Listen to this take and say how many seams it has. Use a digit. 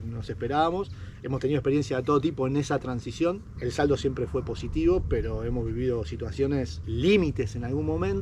0